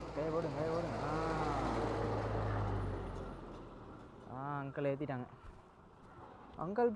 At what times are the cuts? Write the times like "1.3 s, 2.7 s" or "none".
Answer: none